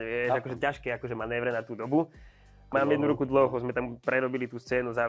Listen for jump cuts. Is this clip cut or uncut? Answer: cut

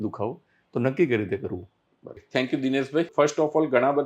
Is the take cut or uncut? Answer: uncut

